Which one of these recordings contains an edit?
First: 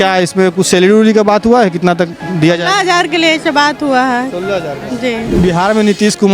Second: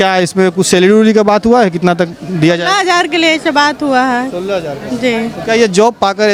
first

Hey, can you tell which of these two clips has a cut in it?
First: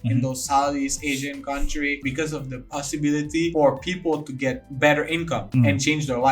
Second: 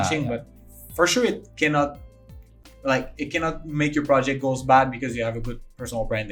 first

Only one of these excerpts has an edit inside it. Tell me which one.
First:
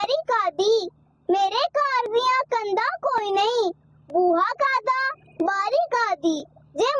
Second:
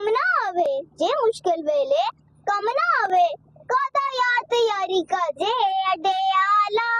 second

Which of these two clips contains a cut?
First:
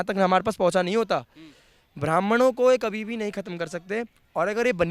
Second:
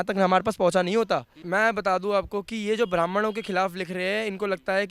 second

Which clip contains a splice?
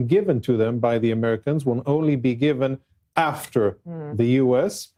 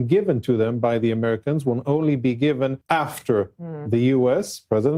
second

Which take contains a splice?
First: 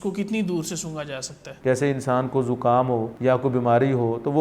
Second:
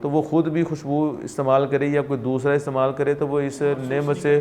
first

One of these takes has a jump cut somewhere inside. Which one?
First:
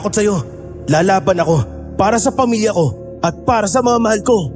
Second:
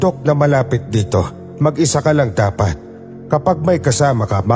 second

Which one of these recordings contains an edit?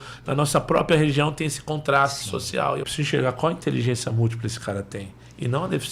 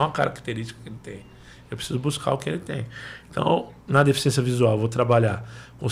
first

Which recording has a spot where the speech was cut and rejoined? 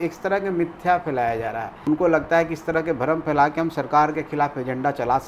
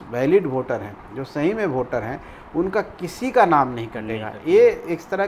first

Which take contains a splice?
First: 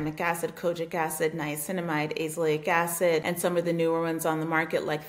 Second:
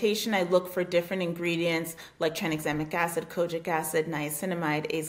first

